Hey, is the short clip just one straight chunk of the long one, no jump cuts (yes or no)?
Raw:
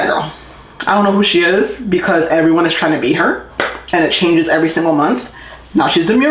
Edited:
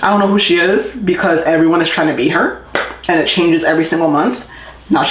yes